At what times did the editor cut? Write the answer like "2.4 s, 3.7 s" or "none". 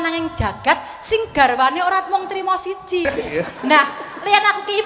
3.1 s